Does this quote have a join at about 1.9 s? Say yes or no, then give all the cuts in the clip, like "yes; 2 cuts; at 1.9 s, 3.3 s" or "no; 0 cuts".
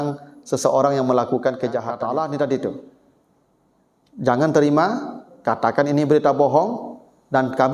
yes; 1 cut; at 1.9 s